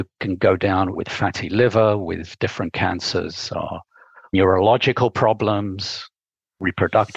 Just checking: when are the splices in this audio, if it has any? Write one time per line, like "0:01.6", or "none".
0:01.0
0:02.3
0:04.3